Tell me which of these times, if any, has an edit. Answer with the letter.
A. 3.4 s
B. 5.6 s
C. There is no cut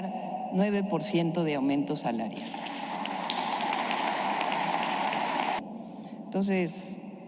B